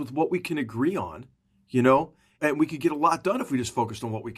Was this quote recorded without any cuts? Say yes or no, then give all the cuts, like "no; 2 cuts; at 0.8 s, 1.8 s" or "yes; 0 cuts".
no; 1 cut; at 2.4 s